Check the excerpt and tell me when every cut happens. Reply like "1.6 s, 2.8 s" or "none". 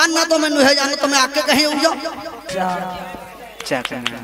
2.5 s

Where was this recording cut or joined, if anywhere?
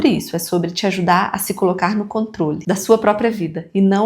2.6 s

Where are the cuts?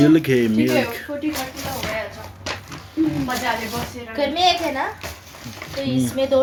none

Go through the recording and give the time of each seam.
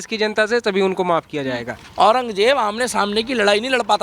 1.8 s

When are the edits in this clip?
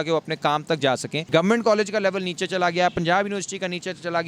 1.3 s

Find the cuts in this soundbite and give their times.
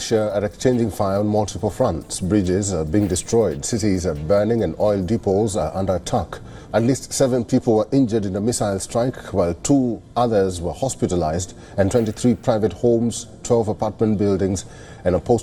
none

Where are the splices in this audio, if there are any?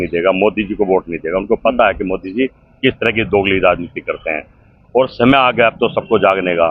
none

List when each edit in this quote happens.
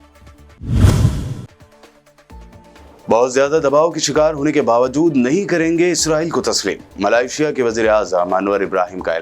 1.2 s

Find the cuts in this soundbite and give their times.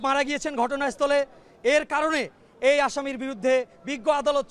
none

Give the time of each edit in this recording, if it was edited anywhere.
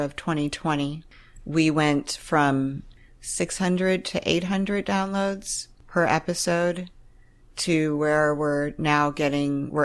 1.0 s, 2.9 s

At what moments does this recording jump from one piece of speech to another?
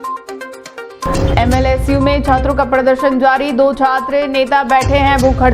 1.1 s

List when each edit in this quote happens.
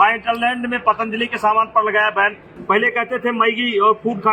2.5 s

